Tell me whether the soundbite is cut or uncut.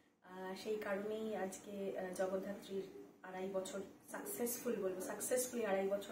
uncut